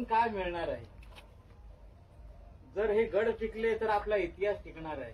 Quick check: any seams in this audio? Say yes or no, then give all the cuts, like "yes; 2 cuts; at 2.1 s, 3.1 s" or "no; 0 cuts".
no; 0 cuts